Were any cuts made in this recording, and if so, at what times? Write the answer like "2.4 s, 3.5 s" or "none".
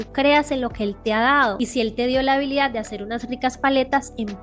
1.6 s